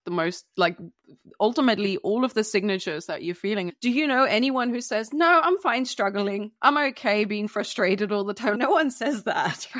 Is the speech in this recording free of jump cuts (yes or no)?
no